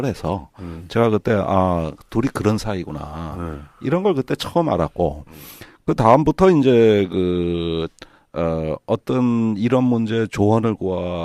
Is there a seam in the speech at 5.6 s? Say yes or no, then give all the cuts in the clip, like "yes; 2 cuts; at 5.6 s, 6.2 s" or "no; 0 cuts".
no; 1 cut; at 8.4 s